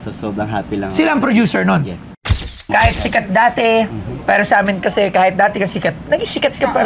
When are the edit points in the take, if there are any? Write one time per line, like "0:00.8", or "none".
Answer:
0:02.5

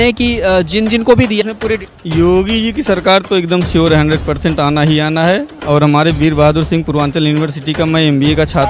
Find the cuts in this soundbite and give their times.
0:01.8

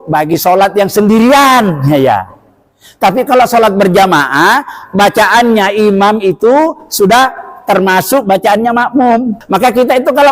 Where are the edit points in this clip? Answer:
0:09.4

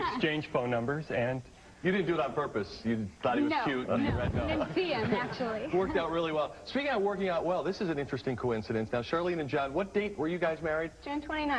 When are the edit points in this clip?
0:04.9

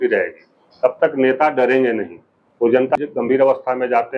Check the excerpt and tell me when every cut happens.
0:03.0

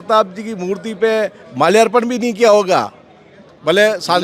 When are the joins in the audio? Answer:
none

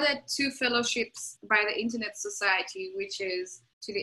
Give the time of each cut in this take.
none

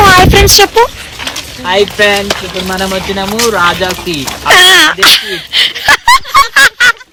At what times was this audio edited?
none

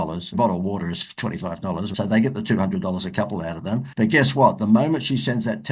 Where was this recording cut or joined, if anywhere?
none

